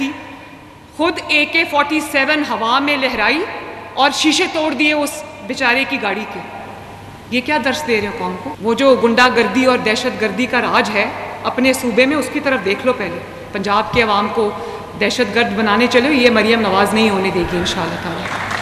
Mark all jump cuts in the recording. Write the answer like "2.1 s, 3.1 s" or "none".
8.5 s